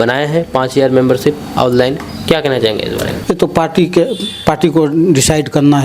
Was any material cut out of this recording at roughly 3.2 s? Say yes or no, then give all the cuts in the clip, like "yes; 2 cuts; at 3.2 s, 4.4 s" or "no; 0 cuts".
yes; 1 cut; at 3.2 s